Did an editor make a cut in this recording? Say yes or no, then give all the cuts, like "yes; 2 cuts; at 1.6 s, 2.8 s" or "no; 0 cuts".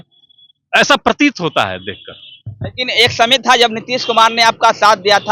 no; 0 cuts